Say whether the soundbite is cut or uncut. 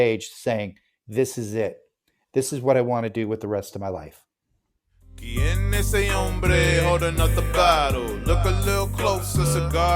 cut